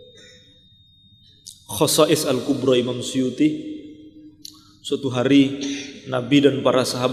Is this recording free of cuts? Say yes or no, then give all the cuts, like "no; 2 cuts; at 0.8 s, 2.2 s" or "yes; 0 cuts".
yes; 0 cuts